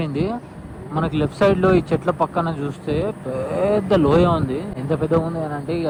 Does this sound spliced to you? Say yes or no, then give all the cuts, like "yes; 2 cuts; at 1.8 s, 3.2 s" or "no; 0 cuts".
no; 0 cuts